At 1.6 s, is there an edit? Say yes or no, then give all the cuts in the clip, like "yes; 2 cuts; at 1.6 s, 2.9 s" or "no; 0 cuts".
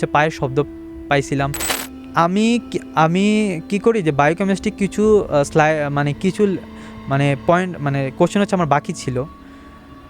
yes; 1 cut; at 1.6 s